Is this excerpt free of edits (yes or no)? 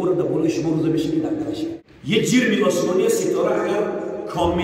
no